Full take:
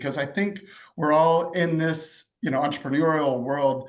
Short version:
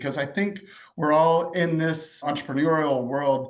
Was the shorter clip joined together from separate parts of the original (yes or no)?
yes